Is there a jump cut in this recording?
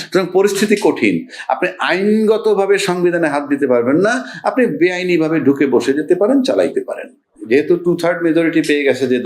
yes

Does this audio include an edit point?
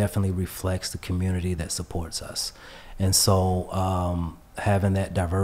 no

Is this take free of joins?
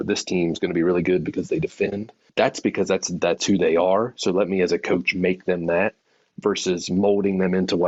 yes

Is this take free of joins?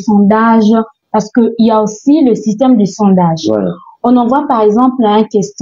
yes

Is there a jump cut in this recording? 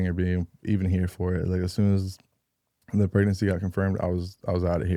no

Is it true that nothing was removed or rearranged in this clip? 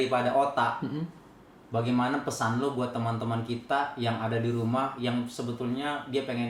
yes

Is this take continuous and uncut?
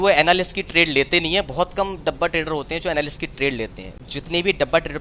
no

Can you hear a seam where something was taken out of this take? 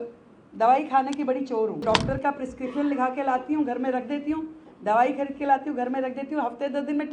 yes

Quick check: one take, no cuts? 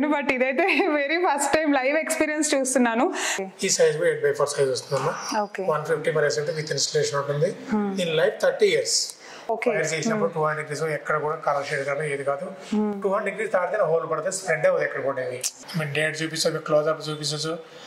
no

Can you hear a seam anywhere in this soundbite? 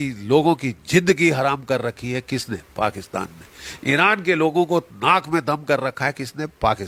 no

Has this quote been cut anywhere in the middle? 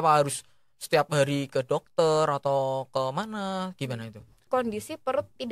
yes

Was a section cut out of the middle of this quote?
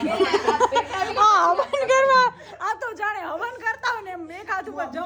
no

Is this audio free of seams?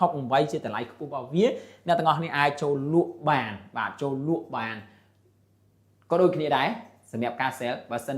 yes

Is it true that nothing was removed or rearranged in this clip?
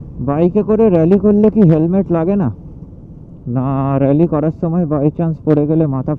yes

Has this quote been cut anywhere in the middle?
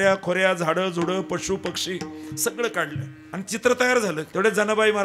yes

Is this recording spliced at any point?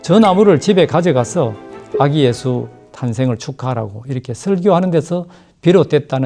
no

